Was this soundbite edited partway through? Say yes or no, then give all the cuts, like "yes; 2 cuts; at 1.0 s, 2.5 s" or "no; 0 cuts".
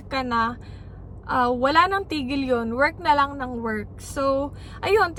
no; 0 cuts